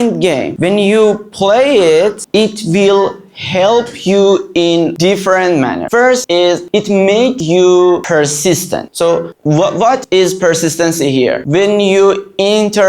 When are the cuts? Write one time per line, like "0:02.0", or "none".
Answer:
none